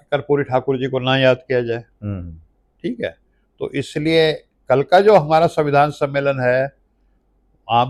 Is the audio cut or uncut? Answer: uncut